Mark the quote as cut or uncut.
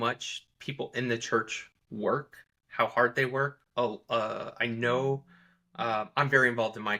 uncut